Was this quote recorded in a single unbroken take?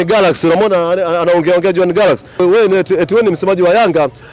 no; 1 cut; at 2.4 s

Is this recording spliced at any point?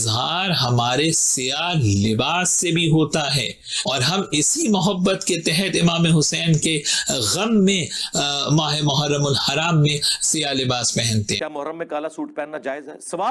yes; 1 cut; at 11.4 s

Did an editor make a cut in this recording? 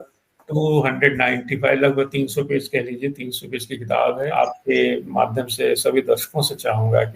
yes; 1 cut; at 4.3 s

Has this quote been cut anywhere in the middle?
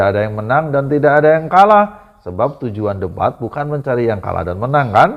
no; 0 cuts

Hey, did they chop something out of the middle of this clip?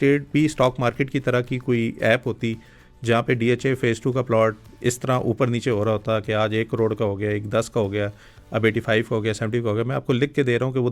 no; 0 cuts

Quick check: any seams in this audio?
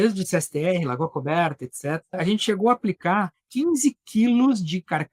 yes; 2 cuts; at 2.2 s, 3.4 s

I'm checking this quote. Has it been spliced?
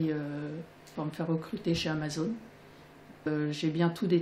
yes; 1 cut; at 3.3 s

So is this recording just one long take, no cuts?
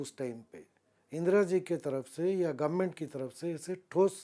yes; 0 cuts

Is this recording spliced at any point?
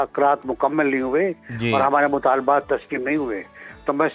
no; 0 cuts

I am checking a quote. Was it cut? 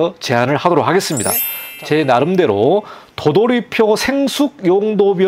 yes; 1 cut; at 1.5 s

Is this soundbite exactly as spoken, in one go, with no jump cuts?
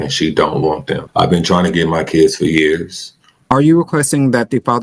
no; 2 cuts; at 1.0 s, 3.4 s

